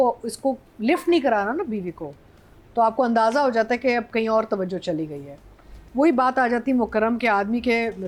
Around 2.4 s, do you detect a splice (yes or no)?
no